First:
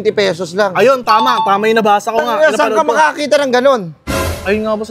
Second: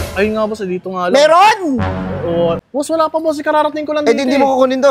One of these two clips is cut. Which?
second; 1 cut; at 2.6 s

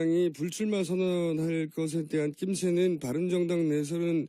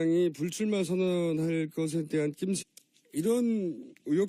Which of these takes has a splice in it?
first; 1 cut; at 2.6 s

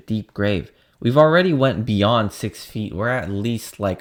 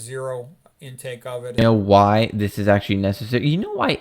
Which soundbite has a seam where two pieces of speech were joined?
second; 1 cut; at 1.6 s

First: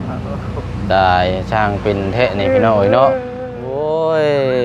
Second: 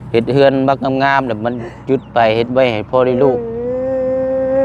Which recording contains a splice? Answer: first; 1 cut; at 3.6 s

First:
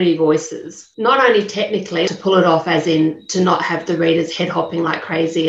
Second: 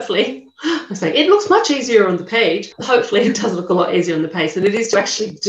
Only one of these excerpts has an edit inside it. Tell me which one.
first; 1 cut; at 2.1 s

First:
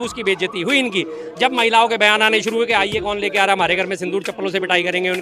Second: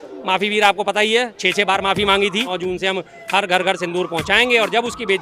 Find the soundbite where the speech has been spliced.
second; 1 cut; at 2.5 s

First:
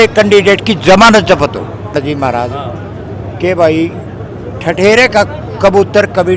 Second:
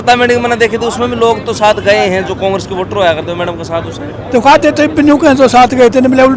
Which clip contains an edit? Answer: first; 1 cut; at 1.9 s

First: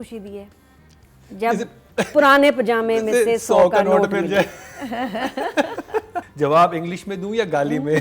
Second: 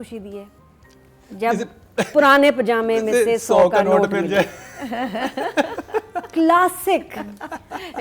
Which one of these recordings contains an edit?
first; 1 cut; at 6.2 s

